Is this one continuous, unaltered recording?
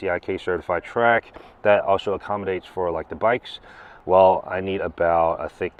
yes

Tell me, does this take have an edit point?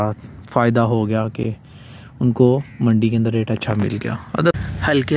no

